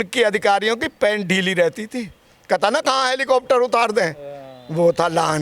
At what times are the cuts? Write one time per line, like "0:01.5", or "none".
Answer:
none